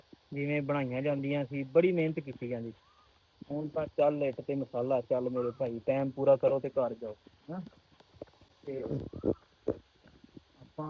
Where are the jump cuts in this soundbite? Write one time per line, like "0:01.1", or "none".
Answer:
none